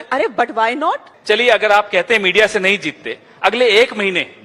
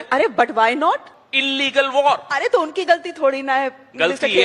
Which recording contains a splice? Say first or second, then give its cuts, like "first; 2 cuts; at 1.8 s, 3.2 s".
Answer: first; 1 cut; at 1.1 s